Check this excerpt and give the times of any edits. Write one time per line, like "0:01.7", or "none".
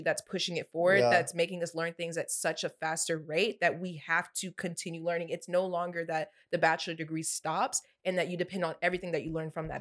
none